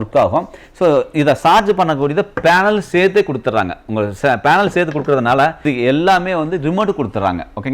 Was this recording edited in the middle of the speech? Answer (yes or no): yes